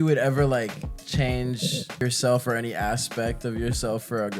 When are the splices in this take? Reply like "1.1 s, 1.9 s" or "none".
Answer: 0.9 s, 2.0 s